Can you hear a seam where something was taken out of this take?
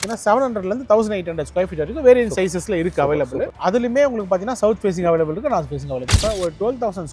yes; 1 cut; at 6.2 s

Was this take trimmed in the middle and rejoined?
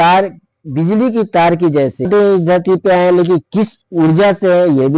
yes; 1 cut; at 2.1 s

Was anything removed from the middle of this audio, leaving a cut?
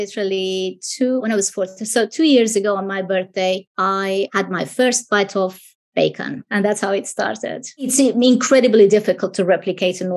yes; 3 cuts; at 4.2 s, 6.4 s, 7.9 s

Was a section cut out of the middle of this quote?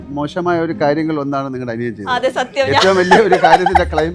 no; 0 cuts

